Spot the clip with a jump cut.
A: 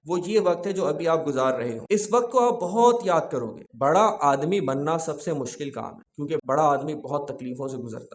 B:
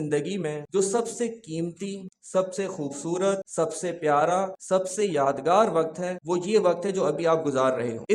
A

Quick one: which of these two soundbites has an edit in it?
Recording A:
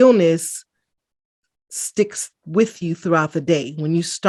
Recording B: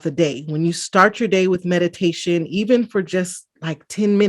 B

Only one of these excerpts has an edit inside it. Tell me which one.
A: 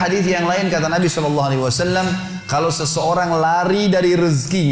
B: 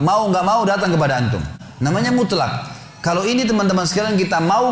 B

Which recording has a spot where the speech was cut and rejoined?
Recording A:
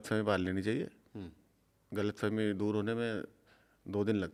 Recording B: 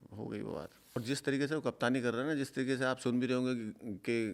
B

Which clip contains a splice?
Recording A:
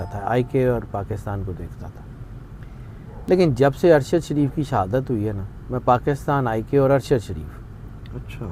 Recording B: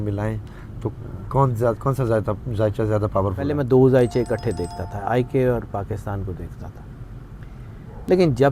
B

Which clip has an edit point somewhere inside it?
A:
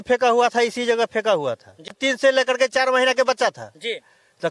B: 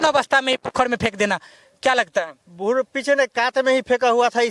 A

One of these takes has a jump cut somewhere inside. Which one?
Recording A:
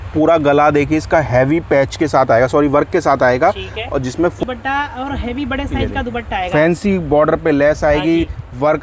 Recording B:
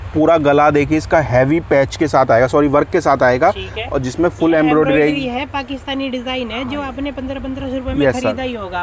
A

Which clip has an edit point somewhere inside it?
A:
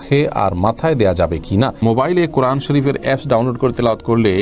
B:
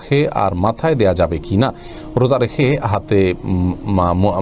A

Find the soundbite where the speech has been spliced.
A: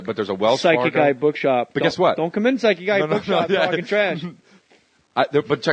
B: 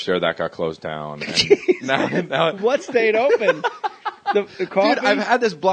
B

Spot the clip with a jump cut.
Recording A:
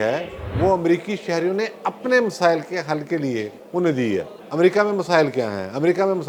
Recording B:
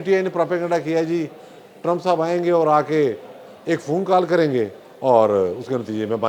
A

